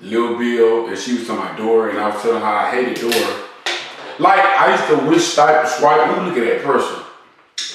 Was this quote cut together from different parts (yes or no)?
no